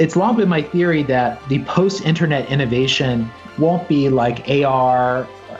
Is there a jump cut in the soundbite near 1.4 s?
yes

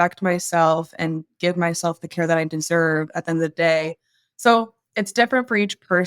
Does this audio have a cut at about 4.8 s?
yes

